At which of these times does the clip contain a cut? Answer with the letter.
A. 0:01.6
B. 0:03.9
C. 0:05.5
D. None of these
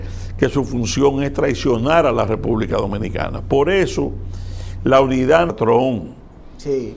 C